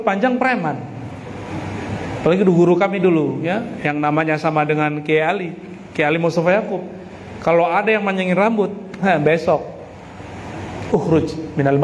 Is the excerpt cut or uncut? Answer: uncut